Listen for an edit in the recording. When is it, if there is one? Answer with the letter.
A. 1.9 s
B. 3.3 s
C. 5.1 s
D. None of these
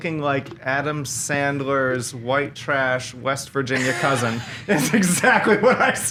D